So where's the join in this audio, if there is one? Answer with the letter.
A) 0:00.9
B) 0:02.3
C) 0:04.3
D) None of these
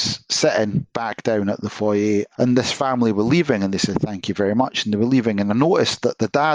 B